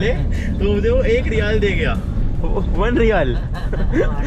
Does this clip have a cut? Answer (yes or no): no